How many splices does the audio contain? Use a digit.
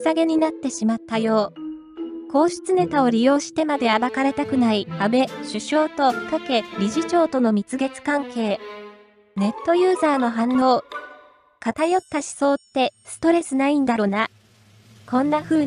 1